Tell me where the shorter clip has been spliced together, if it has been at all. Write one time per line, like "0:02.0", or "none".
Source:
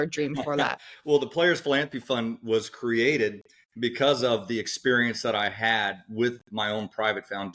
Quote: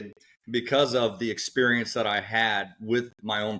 none

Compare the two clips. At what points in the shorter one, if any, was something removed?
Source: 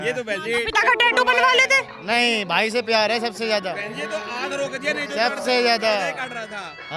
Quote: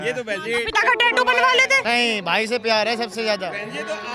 0:01.8

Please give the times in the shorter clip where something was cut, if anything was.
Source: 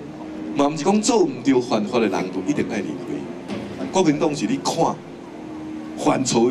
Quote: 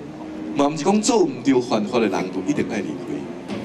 none

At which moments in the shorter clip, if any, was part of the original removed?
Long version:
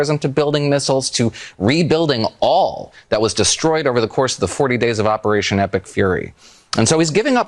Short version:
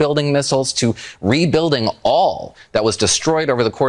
none

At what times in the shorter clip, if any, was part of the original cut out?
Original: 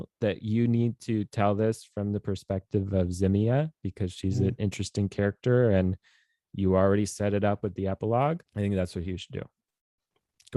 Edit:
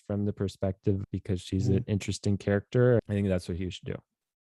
0:01.0
0:03.0

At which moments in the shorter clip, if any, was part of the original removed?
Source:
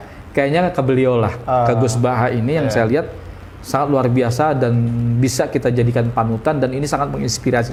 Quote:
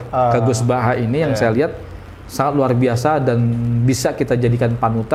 none

